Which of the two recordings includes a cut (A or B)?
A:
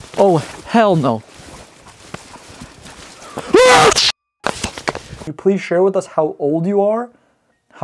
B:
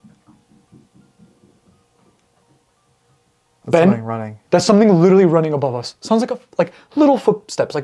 A